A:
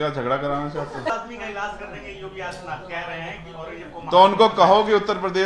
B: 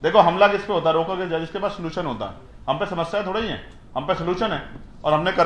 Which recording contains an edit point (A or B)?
A